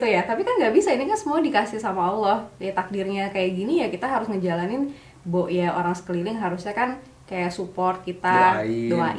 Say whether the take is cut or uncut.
uncut